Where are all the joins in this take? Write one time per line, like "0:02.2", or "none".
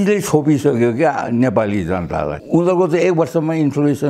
0:02.4